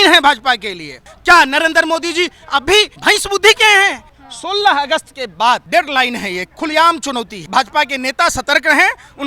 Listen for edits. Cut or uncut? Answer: cut